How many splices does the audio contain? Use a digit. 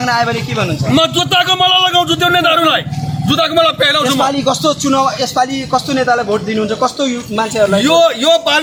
0